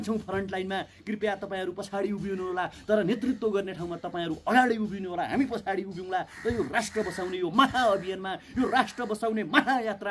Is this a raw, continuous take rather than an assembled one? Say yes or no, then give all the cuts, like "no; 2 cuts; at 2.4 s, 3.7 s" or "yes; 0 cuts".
yes; 0 cuts